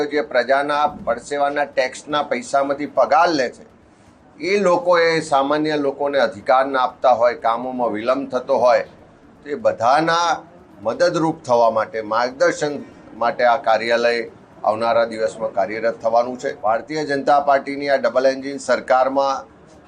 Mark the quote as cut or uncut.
cut